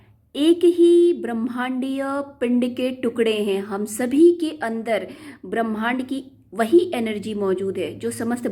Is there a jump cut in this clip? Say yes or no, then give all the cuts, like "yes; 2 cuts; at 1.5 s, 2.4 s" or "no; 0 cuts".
no; 0 cuts